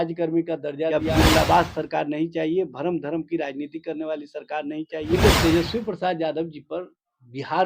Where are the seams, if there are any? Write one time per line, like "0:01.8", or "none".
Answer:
0:01.0
0:05.2